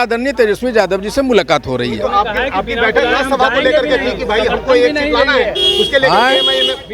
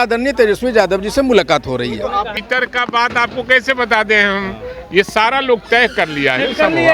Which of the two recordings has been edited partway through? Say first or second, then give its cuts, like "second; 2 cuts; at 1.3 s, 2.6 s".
second; 1 cut; at 2.3 s